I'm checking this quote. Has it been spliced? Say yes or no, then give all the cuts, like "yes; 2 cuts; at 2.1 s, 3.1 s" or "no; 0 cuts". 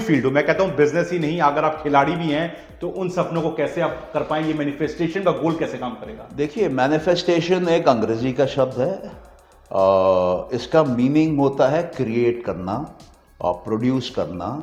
no; 0 cuts